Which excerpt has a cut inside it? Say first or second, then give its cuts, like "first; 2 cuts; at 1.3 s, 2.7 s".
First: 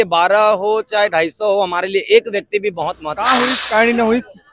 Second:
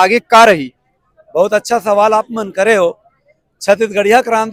first; 1 cut; at 3.1 s